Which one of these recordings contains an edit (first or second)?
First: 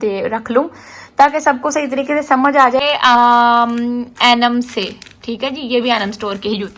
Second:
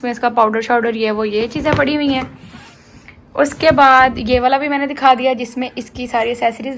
first